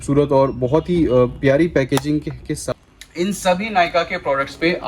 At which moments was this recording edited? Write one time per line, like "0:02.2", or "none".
0:02.6